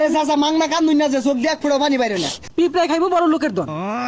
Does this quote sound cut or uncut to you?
cut